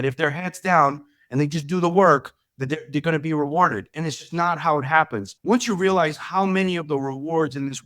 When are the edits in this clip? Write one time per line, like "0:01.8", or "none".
0:05.3